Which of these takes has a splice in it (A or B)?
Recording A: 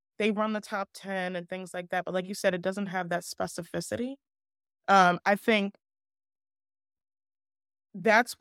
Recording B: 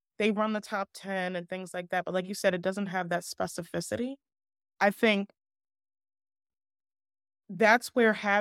B